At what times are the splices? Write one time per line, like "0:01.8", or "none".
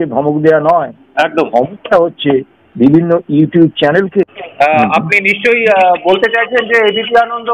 0:04.4